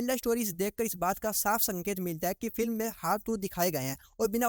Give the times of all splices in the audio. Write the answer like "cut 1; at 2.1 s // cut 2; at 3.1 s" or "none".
none